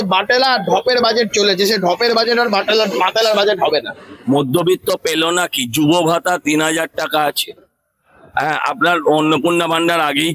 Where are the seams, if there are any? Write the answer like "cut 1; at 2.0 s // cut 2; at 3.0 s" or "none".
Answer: cut 1; at 3.6 s